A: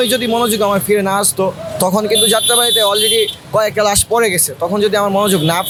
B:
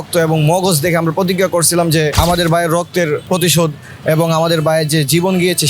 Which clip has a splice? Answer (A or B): B